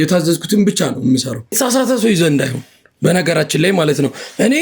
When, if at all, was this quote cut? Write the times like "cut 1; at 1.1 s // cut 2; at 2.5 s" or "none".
cut 1; at 1.5 s